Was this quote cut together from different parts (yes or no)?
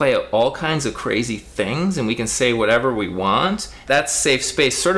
yes